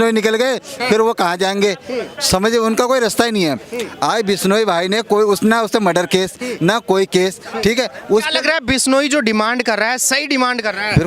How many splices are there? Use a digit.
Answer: 0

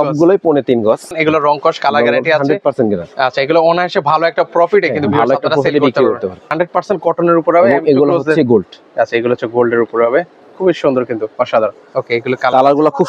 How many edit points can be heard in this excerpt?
3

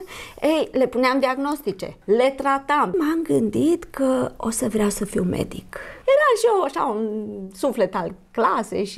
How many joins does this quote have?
3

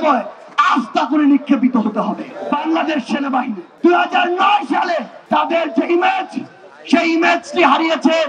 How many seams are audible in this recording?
3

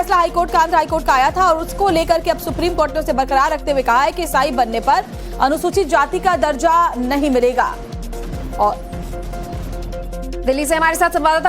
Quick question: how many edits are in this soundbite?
1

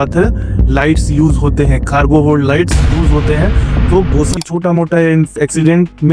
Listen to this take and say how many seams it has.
1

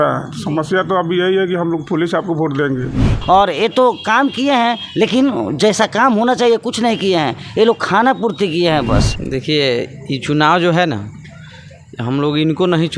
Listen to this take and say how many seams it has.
2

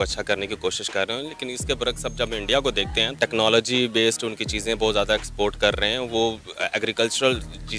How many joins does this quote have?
1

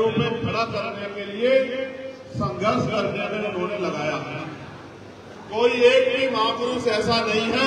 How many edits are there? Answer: 1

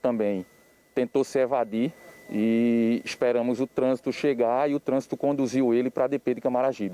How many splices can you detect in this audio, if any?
1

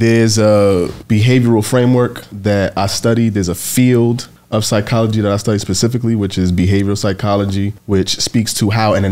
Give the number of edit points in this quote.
4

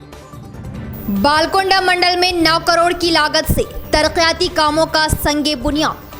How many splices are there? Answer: 1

